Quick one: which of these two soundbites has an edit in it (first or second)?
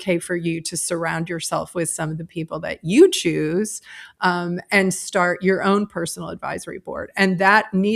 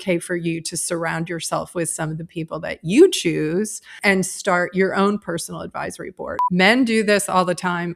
second